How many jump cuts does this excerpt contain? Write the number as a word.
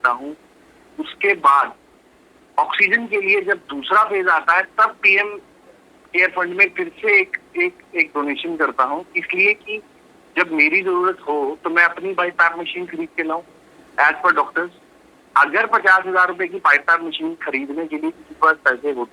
zero